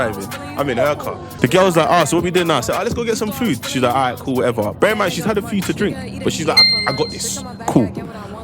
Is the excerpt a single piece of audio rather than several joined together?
no; 1 cut; at 1.2 s

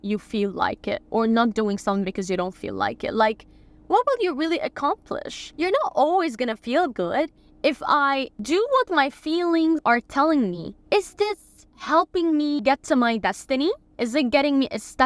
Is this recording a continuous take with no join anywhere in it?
no; 6 cuts; at 5.4 s, 7.4 s, 9.8 s, 10.7 s, 12.6 s, 13.9 s

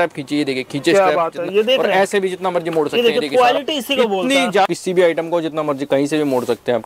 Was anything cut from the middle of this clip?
yes; 1 cut; at 4.7 s

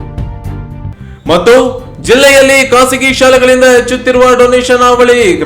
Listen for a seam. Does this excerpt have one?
yes; 1 cut; at 1.0 s

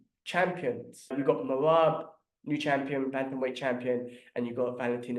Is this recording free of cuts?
no; 1 cut; at 1.1 s

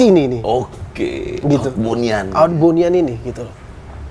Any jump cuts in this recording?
no; 0 cuts

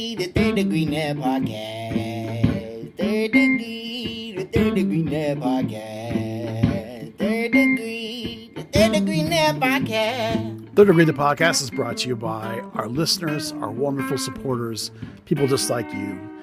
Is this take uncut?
no; 1 cut; at 10.6 s

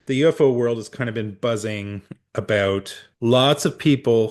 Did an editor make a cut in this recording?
yes; 1 cut; at 3.0 s

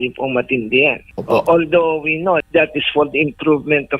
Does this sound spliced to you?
yes; 2 cuts; at 1.1 s, 2.4 s

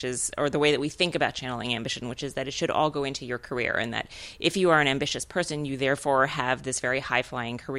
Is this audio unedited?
yes; 0 cuts

